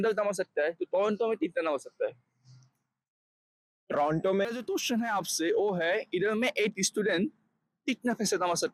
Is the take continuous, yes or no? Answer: no